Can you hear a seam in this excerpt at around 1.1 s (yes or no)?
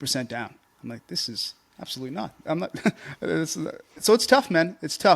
no